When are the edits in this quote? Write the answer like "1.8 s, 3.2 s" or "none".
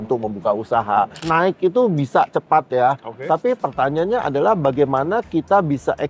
1.2 s

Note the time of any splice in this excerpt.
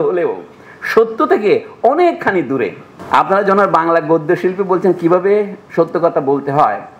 none

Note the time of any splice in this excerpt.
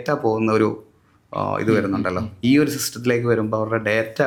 none

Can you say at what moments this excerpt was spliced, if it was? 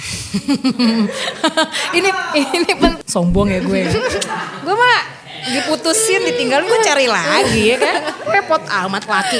3.0 s

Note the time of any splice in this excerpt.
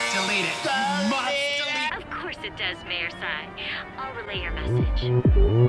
2.0 s

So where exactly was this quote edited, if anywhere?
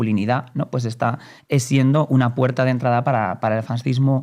none

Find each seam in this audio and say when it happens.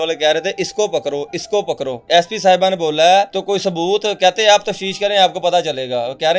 2.0 s, 3.4 s

